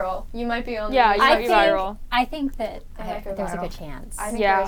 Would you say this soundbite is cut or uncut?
uncut